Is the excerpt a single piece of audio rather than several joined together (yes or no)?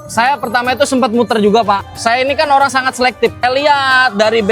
no